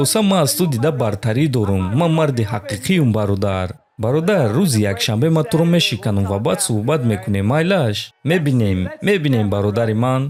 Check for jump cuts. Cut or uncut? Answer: uncut